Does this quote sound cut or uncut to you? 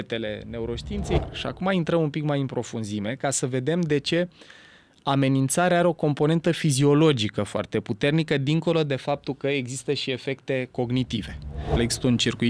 cut